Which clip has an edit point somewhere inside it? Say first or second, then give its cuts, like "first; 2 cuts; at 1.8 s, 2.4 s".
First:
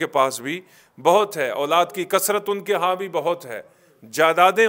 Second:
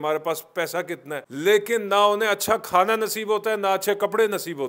second; 1 cut; at 1.2 s